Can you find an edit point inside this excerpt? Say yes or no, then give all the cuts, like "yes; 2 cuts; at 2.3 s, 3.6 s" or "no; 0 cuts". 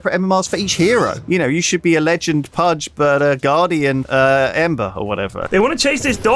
yes; 4 cuts; at 1.2 s, 2.8 s, 4.1 s, 4.9 s